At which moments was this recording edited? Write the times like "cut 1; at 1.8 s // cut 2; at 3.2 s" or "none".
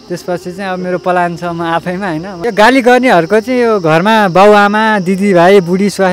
cut 1; at 2.3 s

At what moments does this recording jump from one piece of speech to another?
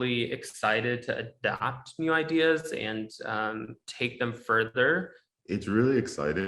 cut 1; at 5.3 s

